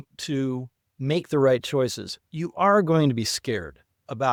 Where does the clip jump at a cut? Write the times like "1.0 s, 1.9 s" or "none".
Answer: none